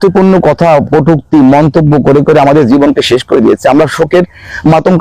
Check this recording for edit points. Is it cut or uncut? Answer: uncut